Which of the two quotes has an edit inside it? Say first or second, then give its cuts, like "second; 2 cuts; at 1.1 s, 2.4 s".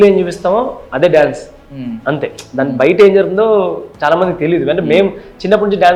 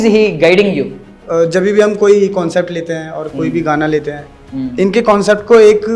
second; 1 cut; at 1.2 s